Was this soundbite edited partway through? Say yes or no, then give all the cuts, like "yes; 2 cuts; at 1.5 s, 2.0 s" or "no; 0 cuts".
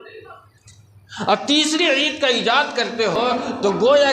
yes; 1 cut; at 3.2 s